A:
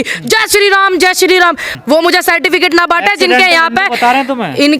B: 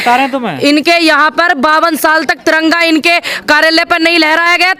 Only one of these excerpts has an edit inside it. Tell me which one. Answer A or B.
A